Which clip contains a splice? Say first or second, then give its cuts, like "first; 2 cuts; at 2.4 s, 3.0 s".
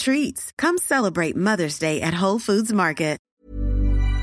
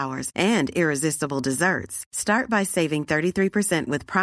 first; 1 cut; at 3.2 s